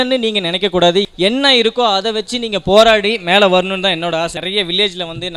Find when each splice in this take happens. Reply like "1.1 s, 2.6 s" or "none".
1.1 s, 4.4 s